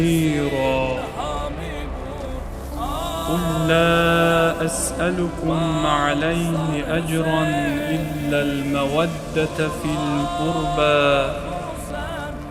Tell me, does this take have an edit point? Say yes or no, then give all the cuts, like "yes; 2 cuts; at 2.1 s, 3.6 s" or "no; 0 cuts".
no; 0 cuts